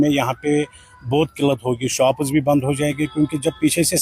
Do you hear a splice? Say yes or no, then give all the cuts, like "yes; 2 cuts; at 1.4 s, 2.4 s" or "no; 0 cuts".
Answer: no; 0 cuts